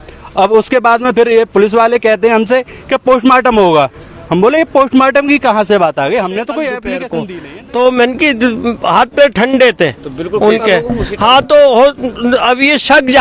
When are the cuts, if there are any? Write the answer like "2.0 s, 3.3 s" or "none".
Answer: 7.1 s